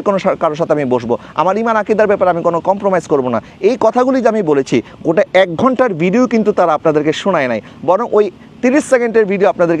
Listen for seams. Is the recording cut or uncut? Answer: uncut